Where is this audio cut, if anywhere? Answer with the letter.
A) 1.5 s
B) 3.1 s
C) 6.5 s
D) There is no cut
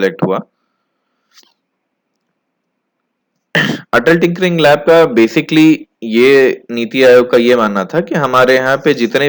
D